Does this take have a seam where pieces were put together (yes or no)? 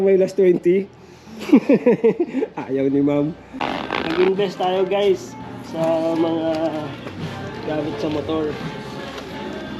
yes